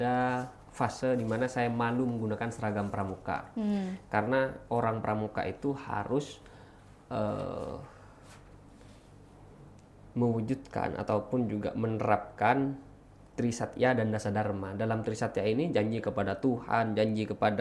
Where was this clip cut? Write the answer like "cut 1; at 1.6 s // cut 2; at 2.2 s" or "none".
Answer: none